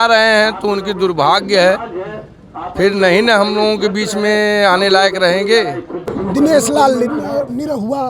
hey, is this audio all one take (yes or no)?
no